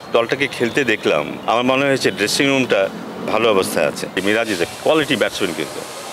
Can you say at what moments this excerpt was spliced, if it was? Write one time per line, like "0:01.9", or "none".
0:01.4
0:04.1